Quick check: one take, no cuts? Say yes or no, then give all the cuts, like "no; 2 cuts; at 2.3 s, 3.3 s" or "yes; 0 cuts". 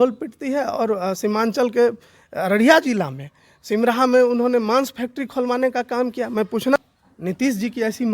no; 1 cut; at 6.8 s